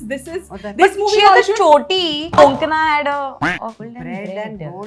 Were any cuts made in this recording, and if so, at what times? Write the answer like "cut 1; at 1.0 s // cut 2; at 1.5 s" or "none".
cut 1; at 2.4 s // cut 2; at 3.8 s